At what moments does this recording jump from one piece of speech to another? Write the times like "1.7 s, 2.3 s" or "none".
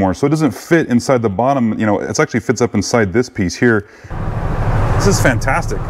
4.1 s